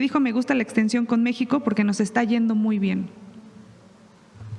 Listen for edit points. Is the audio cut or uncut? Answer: uncut